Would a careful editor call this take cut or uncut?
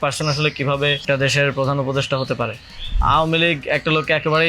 cut